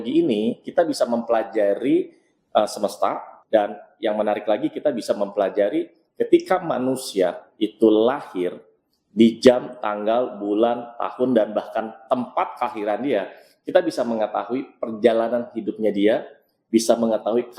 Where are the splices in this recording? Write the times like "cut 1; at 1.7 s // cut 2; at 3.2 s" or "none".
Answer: cut 1; at 3.3 s